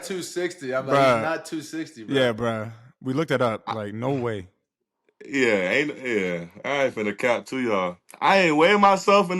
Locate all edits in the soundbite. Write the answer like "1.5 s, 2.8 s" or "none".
8.1 s